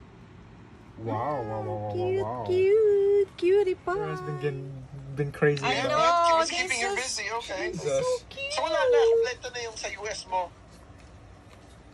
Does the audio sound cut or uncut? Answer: cut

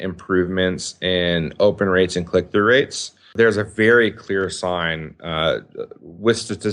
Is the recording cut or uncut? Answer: cut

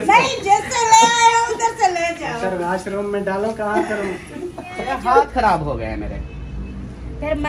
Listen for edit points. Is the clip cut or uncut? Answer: cut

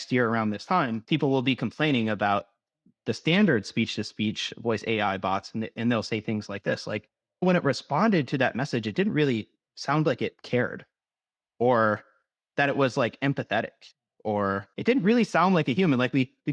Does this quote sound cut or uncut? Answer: cut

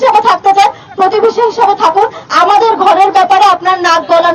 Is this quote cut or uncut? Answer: uncut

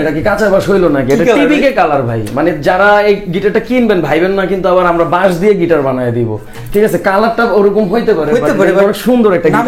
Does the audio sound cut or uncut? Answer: uncut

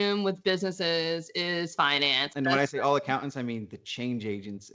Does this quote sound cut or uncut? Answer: cut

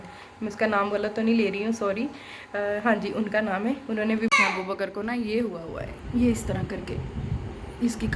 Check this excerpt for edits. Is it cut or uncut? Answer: cut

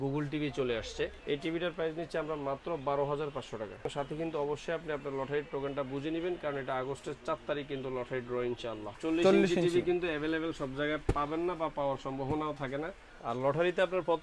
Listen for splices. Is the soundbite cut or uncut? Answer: cut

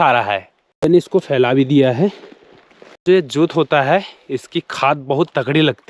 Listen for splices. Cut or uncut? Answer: cut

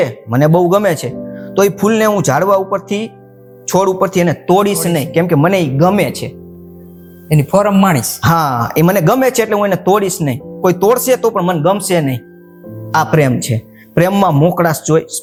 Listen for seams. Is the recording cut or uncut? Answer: uncut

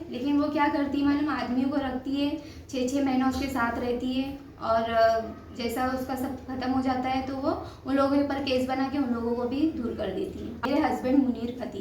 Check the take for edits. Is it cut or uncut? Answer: cut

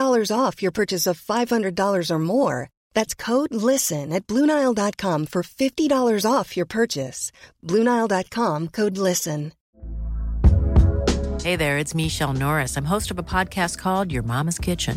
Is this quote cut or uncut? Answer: cut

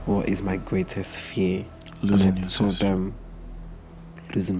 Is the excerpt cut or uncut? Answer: cut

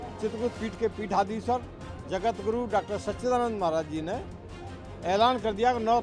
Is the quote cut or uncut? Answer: uncut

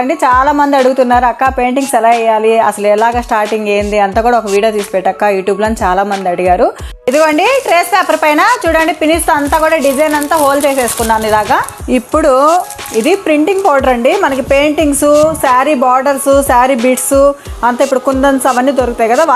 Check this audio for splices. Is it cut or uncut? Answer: cut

